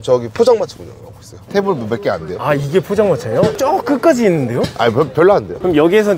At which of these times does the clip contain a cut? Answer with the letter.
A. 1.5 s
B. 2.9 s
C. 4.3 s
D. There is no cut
A